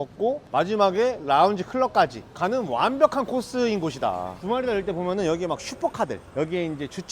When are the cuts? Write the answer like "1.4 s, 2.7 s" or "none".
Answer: 4.4 s